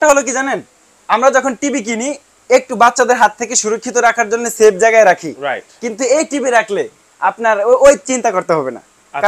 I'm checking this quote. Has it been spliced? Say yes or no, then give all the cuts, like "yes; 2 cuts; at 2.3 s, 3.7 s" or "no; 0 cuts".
no; 0 cuts